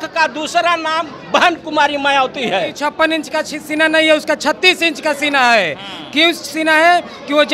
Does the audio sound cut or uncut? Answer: cut